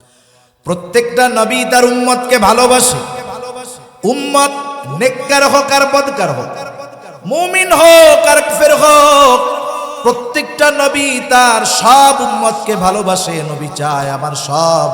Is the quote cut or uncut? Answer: cut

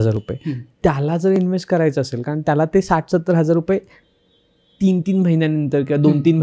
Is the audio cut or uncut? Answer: uncut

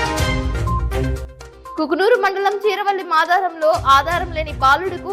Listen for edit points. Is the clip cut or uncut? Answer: cut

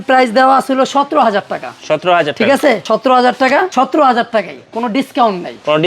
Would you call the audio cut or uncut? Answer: cut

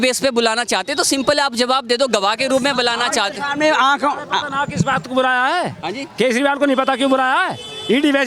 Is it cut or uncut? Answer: uncut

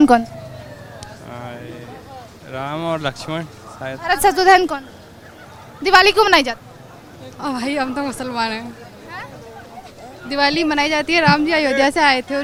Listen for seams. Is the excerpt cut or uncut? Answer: uncut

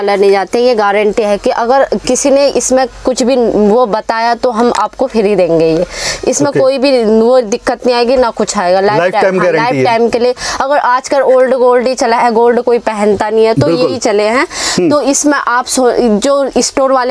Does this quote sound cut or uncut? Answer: uncut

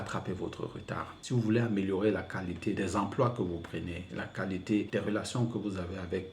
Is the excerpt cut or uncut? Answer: cut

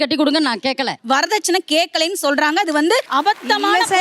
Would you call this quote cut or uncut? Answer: cut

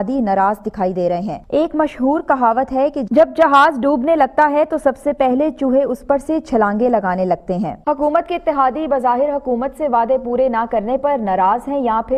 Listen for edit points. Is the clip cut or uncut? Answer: uncut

